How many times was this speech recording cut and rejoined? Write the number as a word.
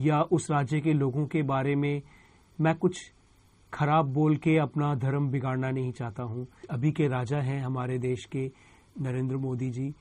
one